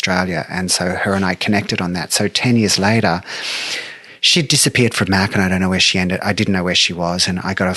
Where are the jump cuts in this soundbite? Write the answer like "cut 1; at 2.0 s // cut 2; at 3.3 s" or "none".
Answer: none